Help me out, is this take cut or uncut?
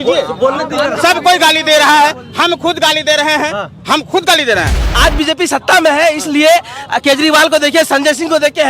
cut